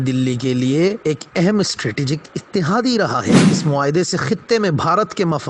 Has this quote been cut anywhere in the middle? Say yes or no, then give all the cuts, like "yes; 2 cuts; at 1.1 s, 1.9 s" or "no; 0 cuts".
no; 0 cuts